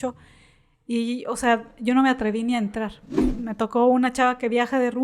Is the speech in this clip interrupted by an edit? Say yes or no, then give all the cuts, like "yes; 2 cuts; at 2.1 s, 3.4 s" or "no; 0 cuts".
yes; 1 cut; at 3.2 s